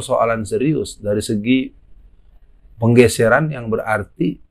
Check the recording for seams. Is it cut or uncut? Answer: uncut